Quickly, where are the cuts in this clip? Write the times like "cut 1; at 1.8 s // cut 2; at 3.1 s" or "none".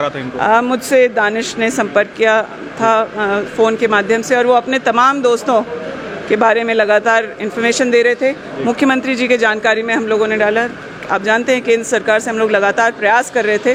none

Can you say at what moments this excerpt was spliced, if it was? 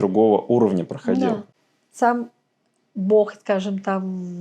cut 1; at 1.5 s

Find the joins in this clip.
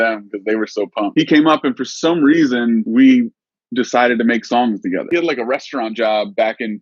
cut 1; at 1.1 s // cut 2; at 2.9 s // cut 3; at 5.1 s

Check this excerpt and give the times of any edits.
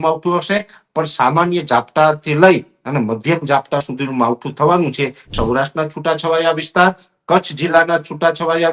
cut 1; at 5.2 s

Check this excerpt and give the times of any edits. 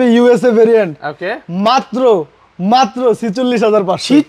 none

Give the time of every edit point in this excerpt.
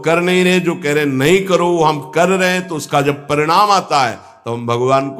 none

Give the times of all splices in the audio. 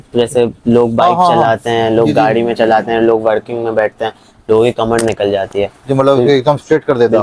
none

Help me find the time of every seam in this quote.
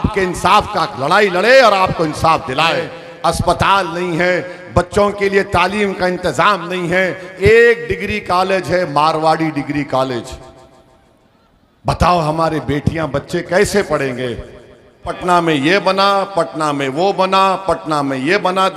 cut 1; at 3.0 s // cut 2; at 7.3 s // cut 3; at 15.2 s

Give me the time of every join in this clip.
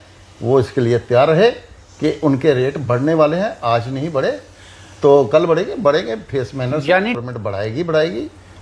cut 1; at 7.2 s

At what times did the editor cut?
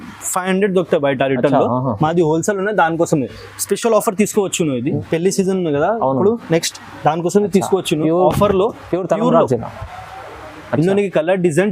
cut 1; at 5.0 s

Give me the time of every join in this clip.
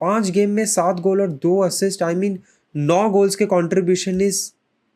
none

